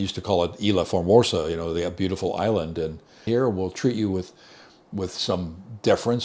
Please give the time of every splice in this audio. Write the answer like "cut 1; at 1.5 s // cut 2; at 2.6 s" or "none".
cut 1; at 3.3 s